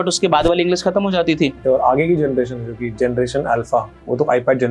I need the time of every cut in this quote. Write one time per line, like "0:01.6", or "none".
0:01.6